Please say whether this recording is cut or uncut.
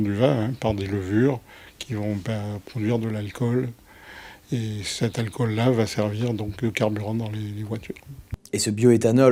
uncut